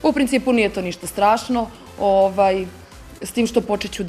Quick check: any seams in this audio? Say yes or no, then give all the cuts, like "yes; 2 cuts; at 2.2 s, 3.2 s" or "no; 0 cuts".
no; 0 cuts